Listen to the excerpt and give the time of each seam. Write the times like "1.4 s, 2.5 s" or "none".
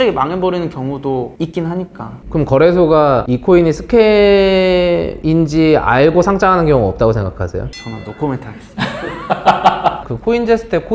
7.8 s, 10.1 s